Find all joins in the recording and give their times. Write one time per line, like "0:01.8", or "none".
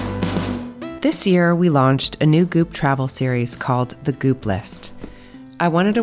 0:00.9